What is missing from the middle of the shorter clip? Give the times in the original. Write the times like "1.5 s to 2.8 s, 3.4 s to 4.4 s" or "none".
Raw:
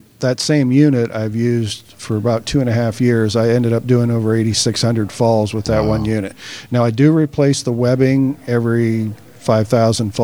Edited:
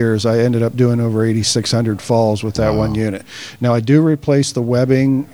none